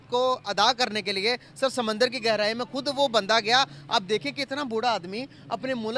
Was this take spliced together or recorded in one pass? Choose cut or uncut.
uncut